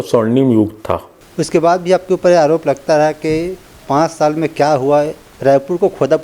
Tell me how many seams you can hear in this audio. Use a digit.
1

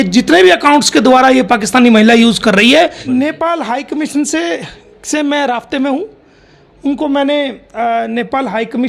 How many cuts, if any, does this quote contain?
1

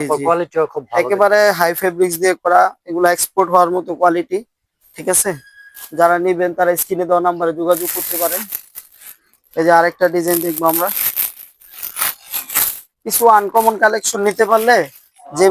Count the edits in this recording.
0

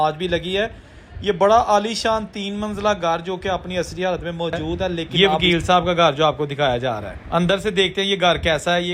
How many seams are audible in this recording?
1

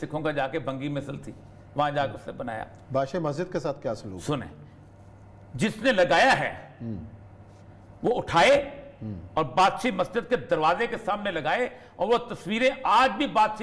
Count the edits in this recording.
0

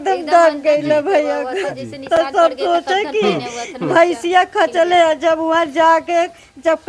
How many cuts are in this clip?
0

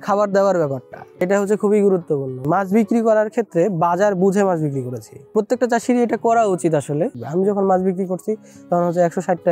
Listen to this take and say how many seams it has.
3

